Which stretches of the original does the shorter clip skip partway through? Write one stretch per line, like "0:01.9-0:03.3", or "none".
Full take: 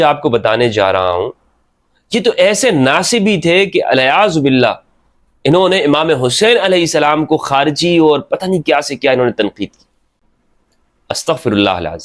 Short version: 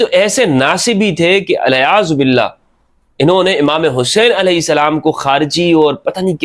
none